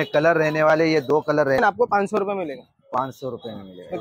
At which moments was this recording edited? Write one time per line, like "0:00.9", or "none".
0:01.6